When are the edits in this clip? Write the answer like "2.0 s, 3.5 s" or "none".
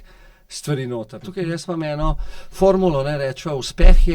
1.2 s